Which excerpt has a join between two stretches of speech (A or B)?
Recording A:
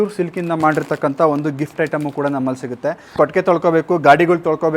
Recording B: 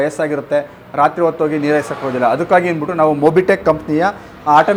A